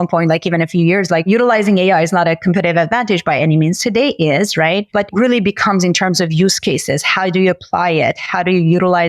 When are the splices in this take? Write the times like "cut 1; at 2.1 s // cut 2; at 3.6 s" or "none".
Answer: cut 1; at 1.3 s // cut 2; at 5.1 s